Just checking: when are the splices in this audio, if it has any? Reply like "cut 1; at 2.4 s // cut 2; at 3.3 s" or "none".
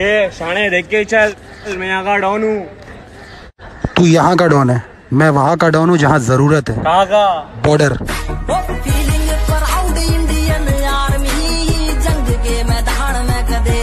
none